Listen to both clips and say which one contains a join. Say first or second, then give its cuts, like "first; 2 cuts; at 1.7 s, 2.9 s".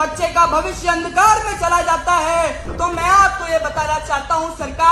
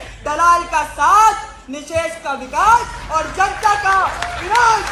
first; 1 cut; at 2.6 s